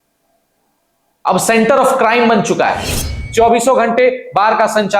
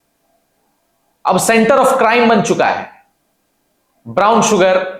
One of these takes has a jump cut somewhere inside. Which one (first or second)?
first